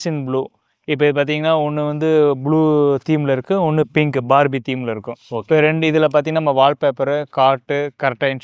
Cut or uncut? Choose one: uncut